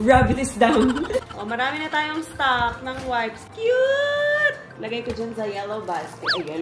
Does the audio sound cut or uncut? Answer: cut